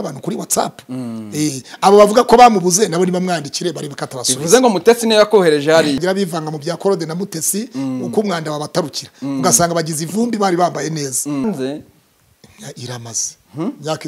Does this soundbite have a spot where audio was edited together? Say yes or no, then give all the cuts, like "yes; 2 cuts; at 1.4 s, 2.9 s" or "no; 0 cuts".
yes; 2 cuts; at 6.0 s, 11.4 s